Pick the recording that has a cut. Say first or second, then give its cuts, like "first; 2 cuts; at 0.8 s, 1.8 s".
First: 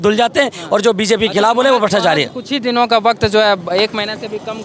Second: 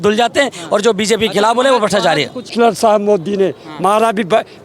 second; 1 cut; at 2.5 s